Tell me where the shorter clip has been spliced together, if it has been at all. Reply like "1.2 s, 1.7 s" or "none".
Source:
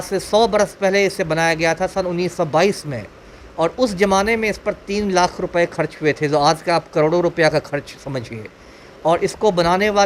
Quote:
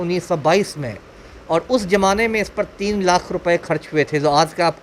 none